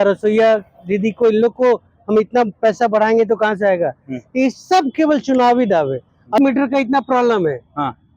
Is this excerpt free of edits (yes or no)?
no